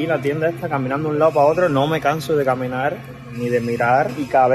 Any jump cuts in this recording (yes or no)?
no